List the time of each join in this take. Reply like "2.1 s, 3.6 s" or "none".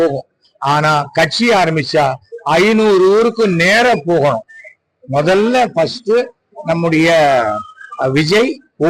none